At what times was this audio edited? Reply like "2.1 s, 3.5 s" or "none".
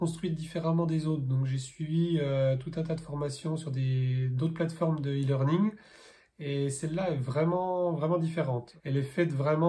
8.7 s